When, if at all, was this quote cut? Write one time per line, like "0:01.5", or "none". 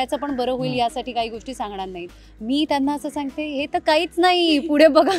0:02.1